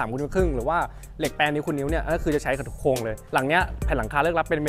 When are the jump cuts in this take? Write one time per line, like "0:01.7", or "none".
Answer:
0:03.2

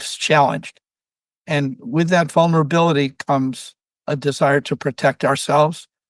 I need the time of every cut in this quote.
none

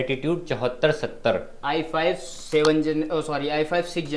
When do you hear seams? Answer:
none

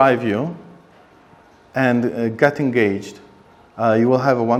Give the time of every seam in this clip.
none

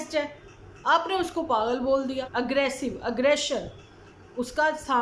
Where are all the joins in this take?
0:02.2

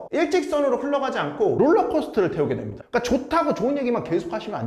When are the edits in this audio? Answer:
none

